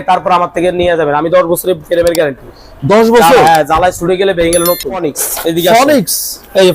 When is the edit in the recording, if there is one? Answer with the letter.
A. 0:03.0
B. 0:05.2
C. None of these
B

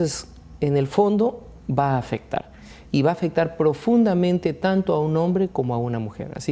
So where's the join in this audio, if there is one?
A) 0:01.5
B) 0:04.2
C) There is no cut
C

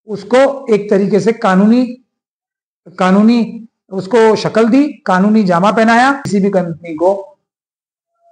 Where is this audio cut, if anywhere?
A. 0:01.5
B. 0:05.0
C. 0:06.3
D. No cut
C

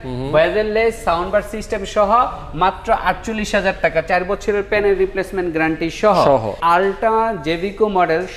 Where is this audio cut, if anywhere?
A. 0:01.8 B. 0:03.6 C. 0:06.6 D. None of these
C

